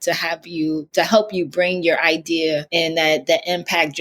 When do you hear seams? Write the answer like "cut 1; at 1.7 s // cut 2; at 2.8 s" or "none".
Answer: cut 1; at 2.7 s